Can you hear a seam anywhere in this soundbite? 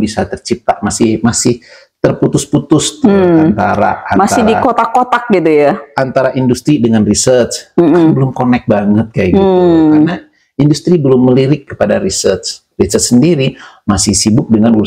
no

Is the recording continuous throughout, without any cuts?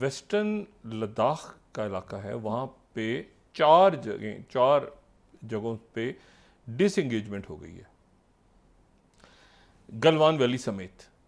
yes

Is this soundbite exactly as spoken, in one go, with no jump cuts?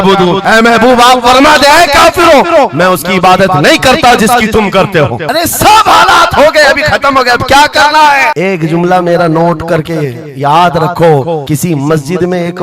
yes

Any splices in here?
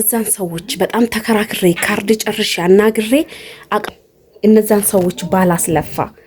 yes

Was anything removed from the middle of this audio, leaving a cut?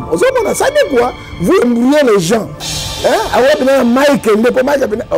yes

